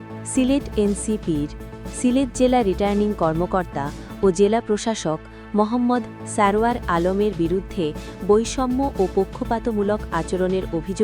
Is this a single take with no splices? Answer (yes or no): yes